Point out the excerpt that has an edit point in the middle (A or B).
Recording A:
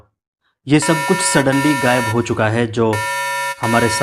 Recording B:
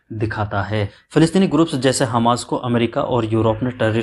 B